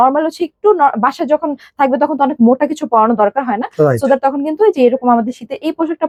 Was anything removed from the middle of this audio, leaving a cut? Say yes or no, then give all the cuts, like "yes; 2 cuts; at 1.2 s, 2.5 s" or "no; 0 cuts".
no; 0 cuts